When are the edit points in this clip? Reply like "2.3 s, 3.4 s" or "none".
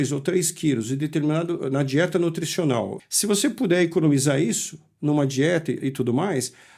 2.9 s